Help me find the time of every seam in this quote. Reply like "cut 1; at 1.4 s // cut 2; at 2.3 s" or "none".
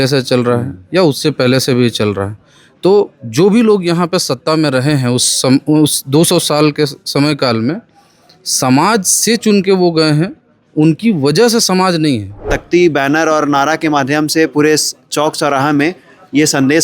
cut 1; at 12.5 s